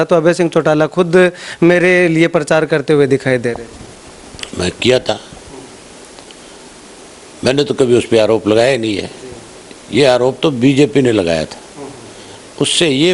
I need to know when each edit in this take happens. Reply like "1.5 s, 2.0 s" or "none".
none